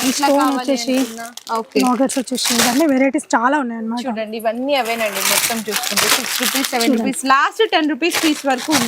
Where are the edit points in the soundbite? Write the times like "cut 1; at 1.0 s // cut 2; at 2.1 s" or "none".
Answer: none